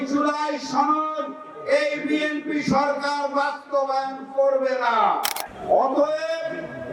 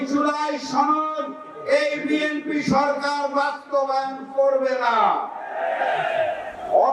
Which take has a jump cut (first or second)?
first